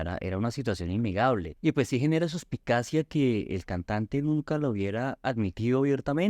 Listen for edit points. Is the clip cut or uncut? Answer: cut